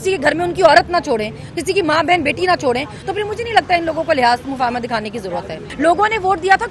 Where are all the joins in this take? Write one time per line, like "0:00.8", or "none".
0:05.6